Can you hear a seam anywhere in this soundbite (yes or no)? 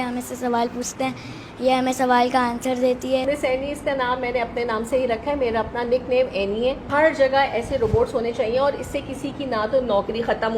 yes